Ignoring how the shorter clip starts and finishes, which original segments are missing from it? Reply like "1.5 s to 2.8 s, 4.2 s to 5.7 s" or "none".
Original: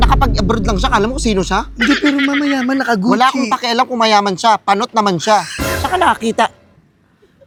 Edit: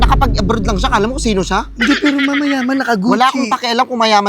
none